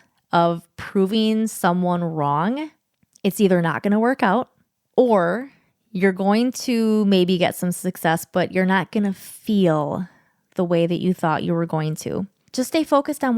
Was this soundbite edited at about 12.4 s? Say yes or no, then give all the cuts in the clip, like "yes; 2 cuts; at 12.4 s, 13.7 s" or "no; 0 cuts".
yes; 1 cut; at 12.4 s